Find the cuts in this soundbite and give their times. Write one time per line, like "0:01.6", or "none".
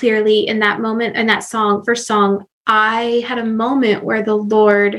0:02.5